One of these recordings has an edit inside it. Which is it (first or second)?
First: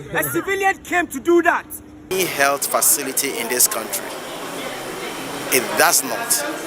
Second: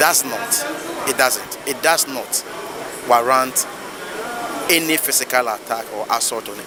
first